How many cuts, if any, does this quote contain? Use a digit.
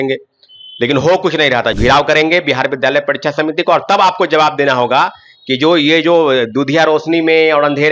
1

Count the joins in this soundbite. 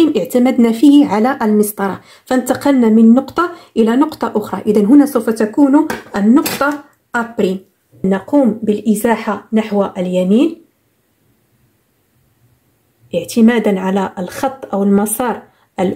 1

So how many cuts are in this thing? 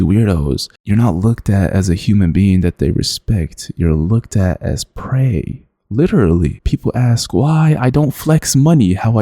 1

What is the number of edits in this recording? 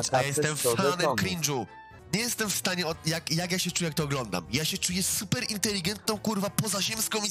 1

